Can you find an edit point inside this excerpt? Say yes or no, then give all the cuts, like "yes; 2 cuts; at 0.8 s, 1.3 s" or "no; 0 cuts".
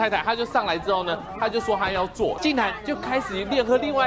yes; 1 cut; at 2.4 s